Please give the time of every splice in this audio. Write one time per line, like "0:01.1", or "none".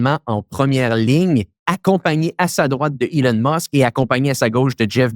none